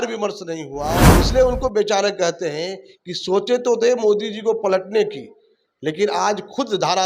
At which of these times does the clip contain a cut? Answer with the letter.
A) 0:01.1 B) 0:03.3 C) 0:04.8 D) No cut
A